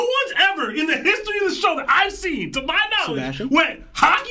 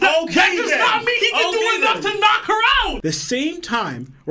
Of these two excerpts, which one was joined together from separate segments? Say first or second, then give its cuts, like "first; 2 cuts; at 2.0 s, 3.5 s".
second; 1 cut; at 3.0 s